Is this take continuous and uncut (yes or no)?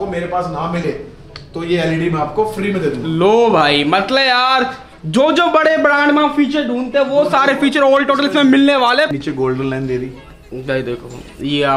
no